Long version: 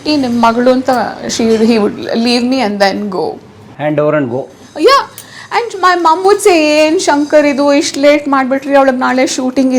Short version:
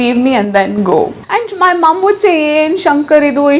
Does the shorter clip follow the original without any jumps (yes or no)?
no